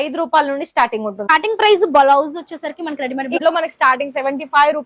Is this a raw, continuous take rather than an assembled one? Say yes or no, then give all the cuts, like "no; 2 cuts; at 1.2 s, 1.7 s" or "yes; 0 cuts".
no; 2 cuts; at 1.3 s, 3.4 s